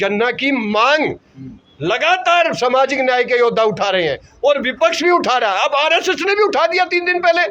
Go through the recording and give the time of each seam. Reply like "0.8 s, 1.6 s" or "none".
none